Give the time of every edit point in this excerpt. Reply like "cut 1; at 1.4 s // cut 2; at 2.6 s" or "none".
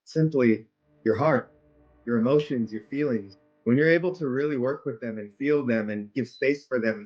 cut 1; at 3.3 s